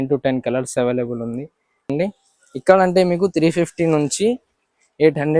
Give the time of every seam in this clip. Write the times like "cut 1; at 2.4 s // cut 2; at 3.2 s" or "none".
cut 1; at 1.9 s